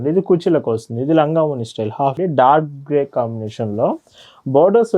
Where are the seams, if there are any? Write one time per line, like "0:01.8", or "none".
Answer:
0:02.2